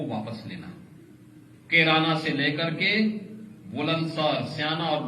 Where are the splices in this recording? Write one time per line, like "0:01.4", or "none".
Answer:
0:01.5